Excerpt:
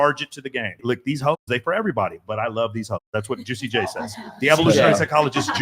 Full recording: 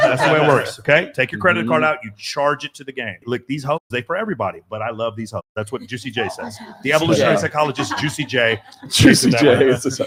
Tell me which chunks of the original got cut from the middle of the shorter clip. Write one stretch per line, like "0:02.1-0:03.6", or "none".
none